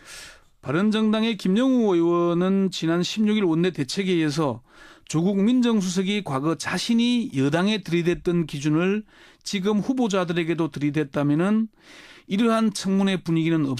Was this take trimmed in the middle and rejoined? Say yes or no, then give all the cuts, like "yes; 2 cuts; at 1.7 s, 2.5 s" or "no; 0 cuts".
yes; 1 cut; at 2.0 s